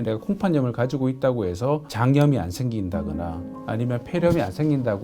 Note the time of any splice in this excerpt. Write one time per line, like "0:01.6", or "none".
none